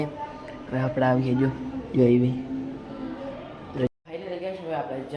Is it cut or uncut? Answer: cut